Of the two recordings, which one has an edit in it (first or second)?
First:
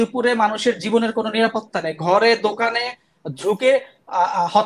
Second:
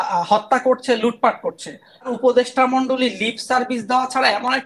second